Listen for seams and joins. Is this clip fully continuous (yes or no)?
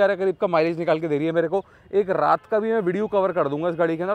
yes